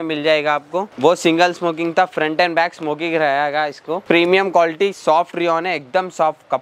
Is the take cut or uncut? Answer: cut